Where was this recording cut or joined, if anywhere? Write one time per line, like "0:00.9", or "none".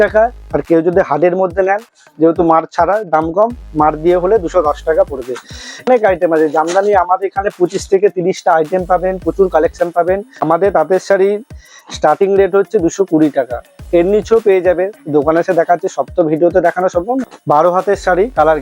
0:05.9
0:10.4
0:17.3